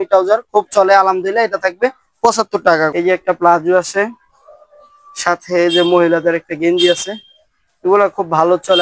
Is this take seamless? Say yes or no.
no